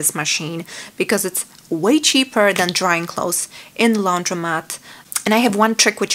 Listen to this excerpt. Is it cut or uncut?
cut